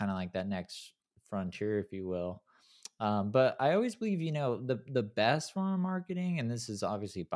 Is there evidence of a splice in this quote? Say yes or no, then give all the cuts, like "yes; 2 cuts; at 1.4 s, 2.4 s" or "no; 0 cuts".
no; 0 cuts